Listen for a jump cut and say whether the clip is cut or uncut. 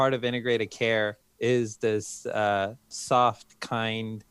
cut